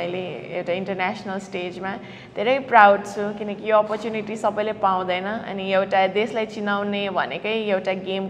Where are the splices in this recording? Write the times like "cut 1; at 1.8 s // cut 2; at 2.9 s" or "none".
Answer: none

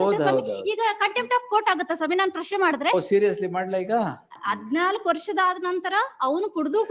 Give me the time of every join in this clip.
cut 1; at 4.4 s

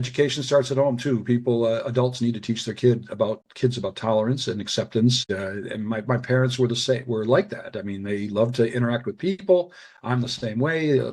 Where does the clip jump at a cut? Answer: cut 1; at 5.2 s

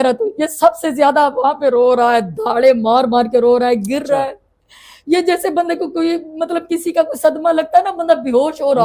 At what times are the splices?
none

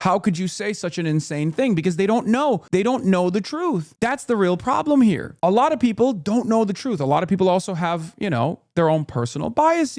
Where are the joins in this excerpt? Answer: cut 1; at 2.6 s // cut 2; at 3.9 s // cut 3; at 5.3 s

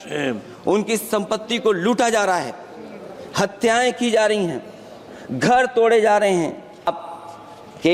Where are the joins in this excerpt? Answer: cut 1; at 6.9 s

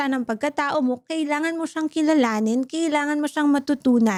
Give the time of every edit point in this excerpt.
none

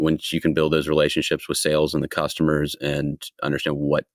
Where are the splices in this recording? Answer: none

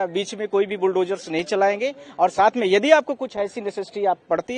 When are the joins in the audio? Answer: none

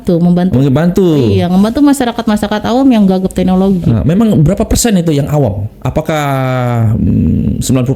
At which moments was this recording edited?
none

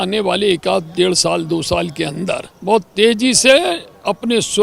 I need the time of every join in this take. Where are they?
cut 1; at 2.5 s

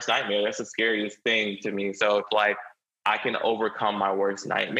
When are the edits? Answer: none

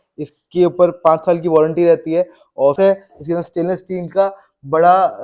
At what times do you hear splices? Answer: cut 1; at 2.8 s

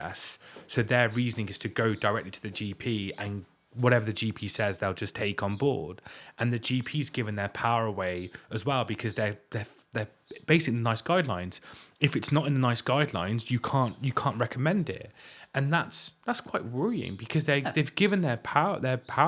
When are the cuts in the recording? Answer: none

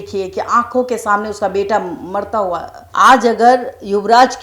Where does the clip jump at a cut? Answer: cut 1; at 2.8 s

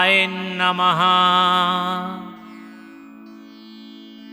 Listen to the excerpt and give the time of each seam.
cut 1; at 2.0 s

